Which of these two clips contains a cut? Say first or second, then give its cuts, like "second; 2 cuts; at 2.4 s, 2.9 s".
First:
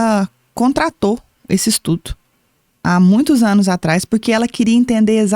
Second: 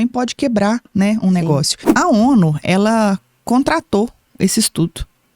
second; 1 cut; at 1.9 s